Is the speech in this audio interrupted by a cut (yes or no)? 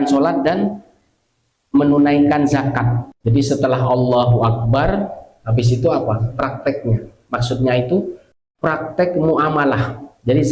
no